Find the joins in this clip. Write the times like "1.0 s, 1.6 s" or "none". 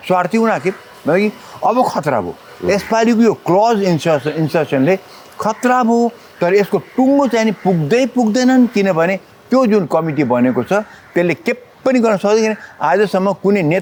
none